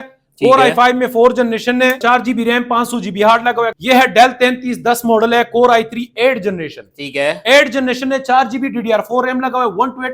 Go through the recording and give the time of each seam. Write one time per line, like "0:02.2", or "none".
0:02.0
0:03.7